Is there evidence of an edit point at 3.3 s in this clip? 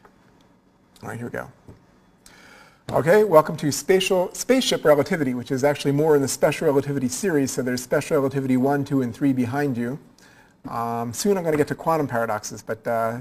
no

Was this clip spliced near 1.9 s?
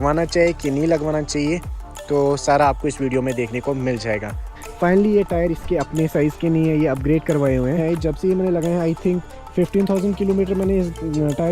no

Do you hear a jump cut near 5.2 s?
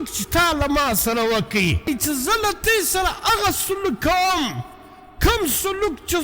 no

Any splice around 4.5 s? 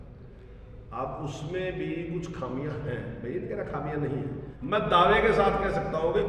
yes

